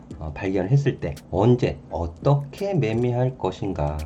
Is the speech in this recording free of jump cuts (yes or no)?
no